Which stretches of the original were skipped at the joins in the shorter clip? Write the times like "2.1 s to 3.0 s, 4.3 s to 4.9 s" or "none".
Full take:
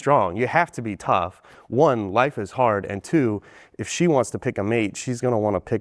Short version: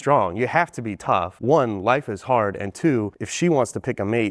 1.3 s to 1.6 s, 3.5 s to 3.8 s